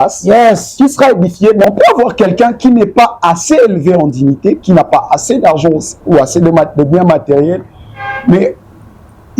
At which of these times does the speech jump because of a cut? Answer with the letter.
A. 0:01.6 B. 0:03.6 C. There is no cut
A